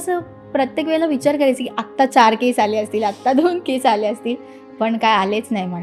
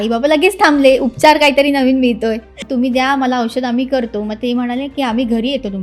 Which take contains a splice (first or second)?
second